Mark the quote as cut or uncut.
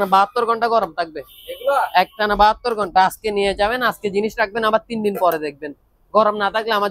uncut